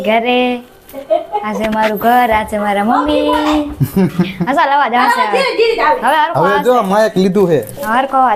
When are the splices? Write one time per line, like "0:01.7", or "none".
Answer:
none

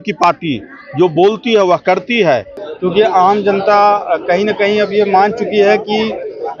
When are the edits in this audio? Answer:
0:02.6

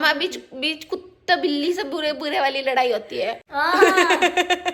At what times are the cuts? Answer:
0:03.4

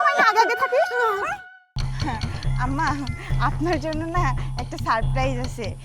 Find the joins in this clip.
0:01.4

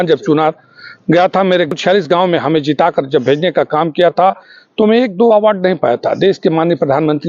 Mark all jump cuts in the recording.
0:01.7

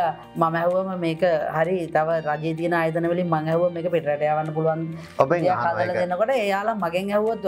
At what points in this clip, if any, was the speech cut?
none

